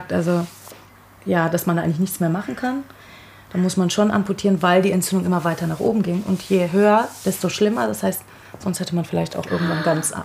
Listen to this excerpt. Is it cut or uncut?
uncut